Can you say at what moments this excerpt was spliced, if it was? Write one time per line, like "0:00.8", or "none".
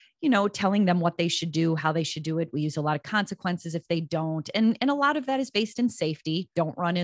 none